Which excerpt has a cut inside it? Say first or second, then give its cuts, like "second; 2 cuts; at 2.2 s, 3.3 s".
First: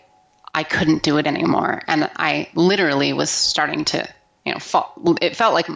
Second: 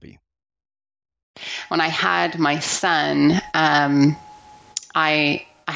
second; 1 cut; at 1.5 s